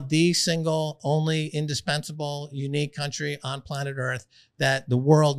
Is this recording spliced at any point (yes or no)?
no